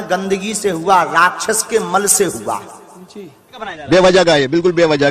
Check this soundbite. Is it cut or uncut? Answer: cut